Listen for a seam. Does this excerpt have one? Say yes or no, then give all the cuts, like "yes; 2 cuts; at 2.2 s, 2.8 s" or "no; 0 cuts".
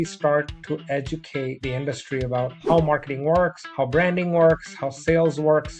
no; 0 cuts